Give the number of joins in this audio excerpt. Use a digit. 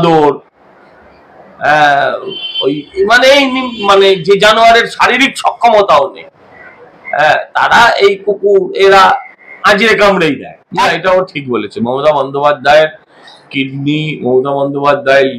1